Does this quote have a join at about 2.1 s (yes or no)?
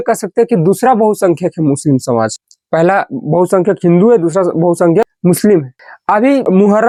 no